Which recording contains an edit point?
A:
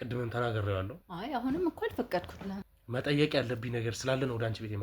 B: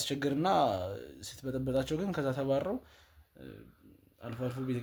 A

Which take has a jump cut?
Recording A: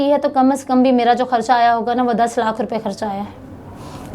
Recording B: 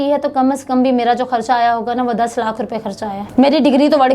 B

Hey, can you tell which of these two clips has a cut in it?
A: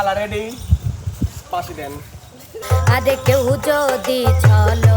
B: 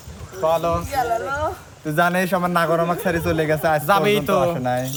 A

